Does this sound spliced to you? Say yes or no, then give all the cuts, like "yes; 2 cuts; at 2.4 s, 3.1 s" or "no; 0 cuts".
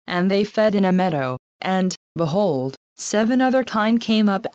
no; 0 cuts